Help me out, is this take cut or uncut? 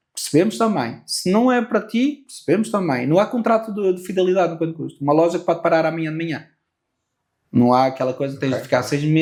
uncut